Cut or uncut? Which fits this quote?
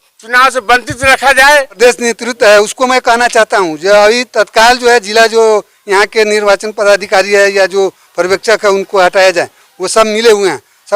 cut